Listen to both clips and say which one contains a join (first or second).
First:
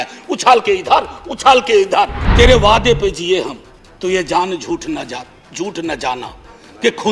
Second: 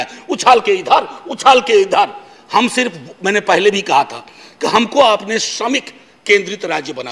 first